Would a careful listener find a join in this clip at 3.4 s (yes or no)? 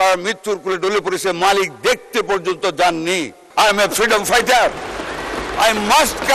yes